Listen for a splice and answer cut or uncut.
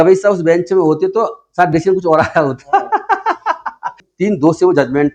cut